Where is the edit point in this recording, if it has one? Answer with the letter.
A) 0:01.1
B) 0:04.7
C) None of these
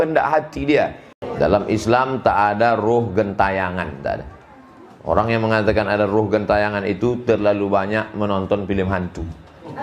A